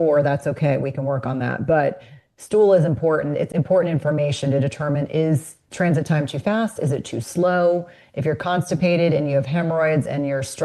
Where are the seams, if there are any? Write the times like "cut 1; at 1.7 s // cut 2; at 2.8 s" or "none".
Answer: none